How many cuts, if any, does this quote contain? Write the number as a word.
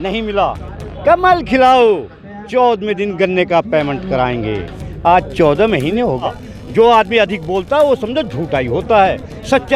one